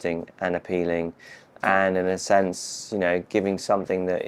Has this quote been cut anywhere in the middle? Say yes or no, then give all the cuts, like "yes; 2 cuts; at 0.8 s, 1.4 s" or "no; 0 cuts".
no; 0 cuts